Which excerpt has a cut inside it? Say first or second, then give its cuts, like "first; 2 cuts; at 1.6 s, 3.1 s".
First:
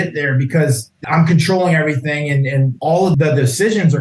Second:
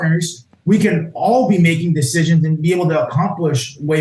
first; 2 cuts; at 0.9 s, 2.9 s